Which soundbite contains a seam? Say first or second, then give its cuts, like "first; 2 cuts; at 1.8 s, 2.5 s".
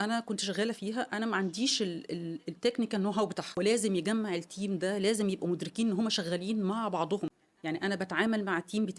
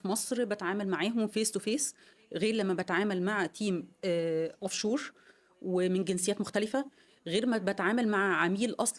first; 2 cuts; at 3.6 s, 7.4 s